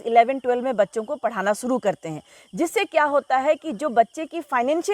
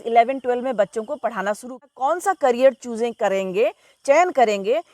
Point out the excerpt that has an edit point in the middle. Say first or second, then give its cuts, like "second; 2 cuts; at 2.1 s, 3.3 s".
second; 1 cut; at 1.7 s